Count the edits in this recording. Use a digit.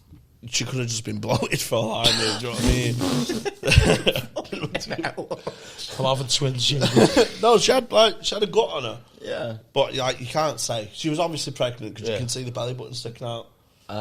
0